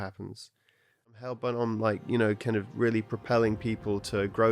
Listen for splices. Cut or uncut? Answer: cut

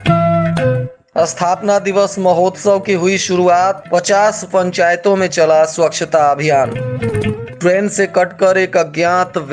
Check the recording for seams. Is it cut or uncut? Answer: cut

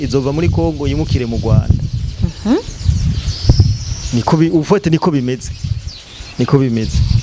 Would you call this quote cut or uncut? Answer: uncut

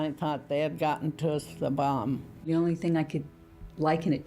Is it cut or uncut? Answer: cut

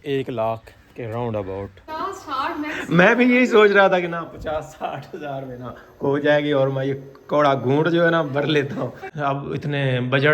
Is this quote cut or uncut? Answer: cut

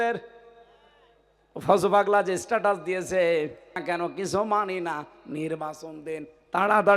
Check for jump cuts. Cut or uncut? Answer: cut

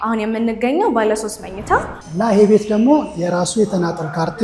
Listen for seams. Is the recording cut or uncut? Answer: cut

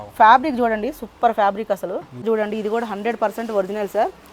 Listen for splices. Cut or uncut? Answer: cut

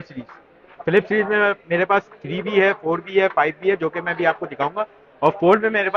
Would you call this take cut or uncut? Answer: uncut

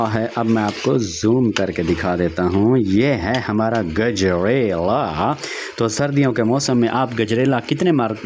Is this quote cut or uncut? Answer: uncut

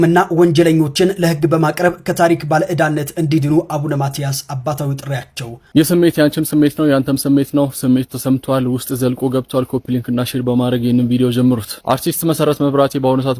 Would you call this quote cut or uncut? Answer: cut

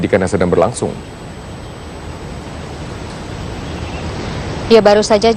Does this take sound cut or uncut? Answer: uncut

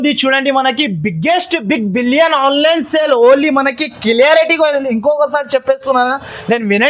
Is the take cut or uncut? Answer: uncut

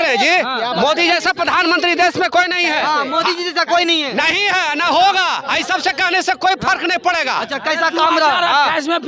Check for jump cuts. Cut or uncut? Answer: uncut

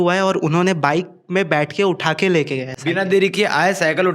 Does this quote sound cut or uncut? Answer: uncut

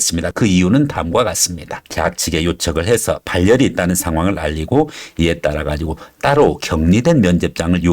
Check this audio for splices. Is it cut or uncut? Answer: cut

